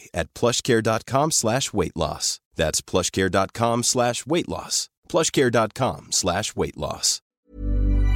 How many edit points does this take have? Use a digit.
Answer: 1